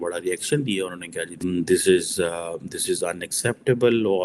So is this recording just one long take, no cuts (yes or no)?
no